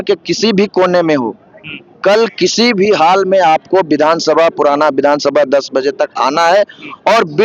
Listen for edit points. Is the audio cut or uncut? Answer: uncut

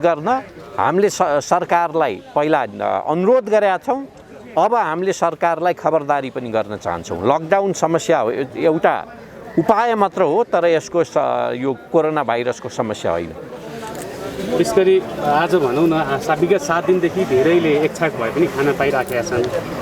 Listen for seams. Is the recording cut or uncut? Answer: uncut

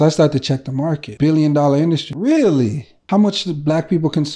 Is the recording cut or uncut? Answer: cut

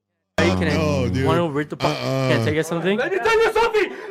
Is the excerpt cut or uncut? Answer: cut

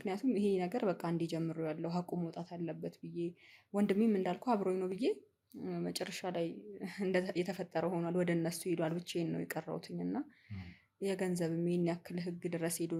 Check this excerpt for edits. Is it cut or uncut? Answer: uncut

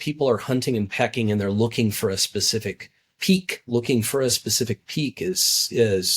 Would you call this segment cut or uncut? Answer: cut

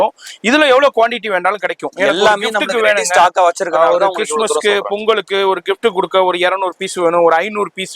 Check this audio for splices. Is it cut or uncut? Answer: uncut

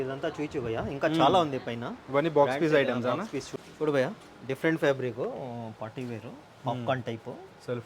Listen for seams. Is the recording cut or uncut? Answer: cut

